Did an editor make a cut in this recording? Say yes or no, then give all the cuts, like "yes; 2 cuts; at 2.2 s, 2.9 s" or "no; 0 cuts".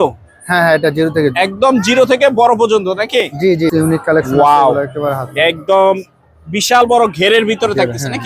yes; 1 cut; at 3.7 s